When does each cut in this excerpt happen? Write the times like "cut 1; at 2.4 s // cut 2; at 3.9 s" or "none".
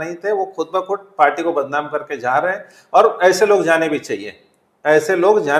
none